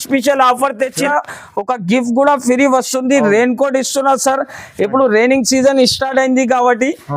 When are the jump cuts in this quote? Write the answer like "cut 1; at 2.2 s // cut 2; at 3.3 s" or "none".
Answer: cut 1; at 1.1 s